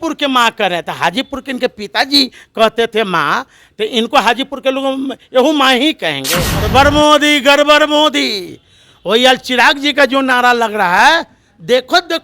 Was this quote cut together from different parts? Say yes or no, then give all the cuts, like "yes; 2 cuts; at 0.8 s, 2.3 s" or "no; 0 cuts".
yes; 1 cut; at 6.7 s